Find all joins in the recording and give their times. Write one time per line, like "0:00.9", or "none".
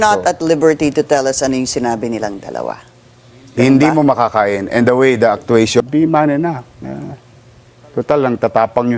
0:05.8